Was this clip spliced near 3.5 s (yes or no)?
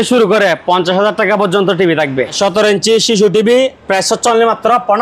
no